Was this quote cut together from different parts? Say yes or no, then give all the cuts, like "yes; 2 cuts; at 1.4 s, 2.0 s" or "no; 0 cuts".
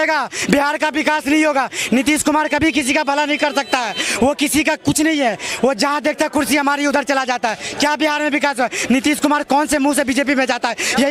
no; 0 cuts